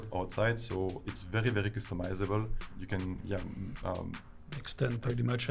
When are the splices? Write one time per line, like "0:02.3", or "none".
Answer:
0:02.8